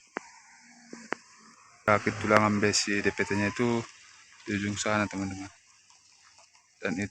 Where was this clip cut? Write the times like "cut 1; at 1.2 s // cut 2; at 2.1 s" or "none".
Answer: cut 1; at 1.8 s